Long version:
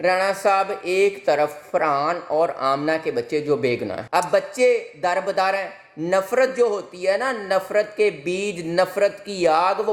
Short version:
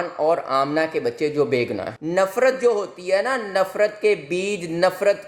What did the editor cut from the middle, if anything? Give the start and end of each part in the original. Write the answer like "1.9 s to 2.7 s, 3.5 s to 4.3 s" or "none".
4.0 s to 5.8 s